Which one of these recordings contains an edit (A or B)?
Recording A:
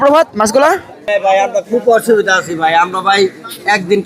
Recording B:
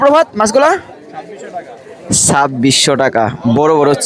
A